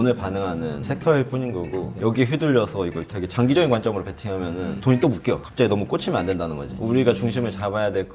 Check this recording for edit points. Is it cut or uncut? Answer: cut